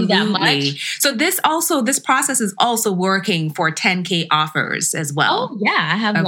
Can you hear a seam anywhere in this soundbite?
no; 0 cuts

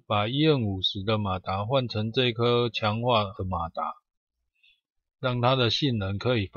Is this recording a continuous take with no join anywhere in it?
yes; 0 cuts

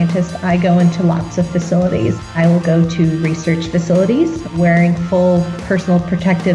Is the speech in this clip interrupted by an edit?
yes; 2 cuts; at 2.1 s, 4.5 s

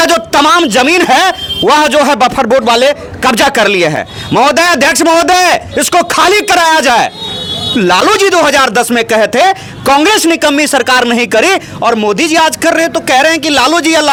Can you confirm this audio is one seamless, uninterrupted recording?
yes; 0 cuts

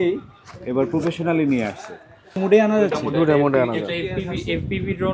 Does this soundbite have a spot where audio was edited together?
yes; 1 cut; at 2.4 s

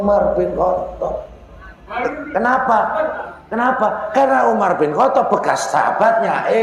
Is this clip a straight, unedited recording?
yes; 0 cuts

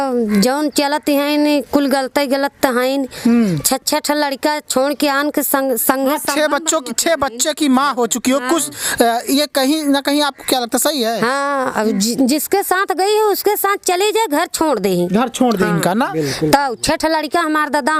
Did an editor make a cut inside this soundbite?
no; 0 cuts

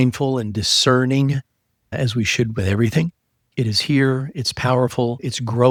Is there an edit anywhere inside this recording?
no; 0 cuts

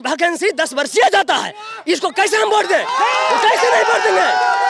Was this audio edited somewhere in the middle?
no; 0 cuts

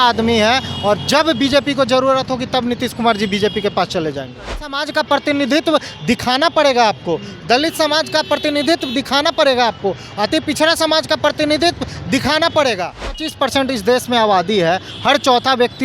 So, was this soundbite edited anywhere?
yes; 2 cuts; at 4.8 s, 13.3 s

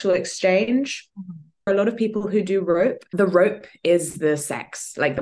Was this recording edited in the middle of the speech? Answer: yes; 2 cuts; at 1.7 s, 3.0 s

